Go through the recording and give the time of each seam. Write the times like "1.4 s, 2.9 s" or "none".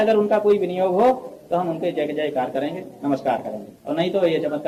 none